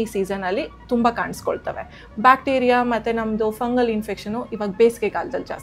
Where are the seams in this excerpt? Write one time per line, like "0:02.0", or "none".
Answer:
none